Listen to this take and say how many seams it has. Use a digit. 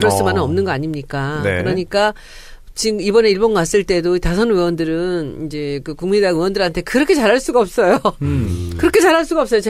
0